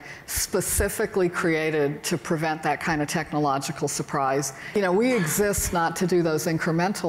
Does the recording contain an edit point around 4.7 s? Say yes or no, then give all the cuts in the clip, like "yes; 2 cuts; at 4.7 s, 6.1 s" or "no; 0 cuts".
yes; 1 cut; at 4.7 s